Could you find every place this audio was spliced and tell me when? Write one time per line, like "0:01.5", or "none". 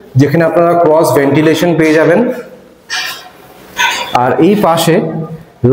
none